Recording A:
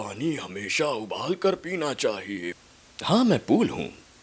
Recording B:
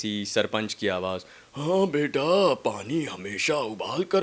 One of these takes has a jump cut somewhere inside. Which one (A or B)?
A